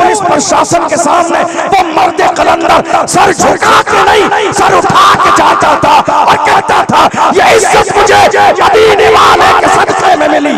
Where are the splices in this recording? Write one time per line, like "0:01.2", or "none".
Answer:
none